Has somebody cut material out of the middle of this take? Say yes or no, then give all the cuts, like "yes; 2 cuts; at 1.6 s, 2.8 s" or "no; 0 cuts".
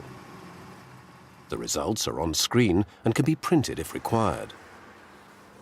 yes; 1 cut; at 4.5 s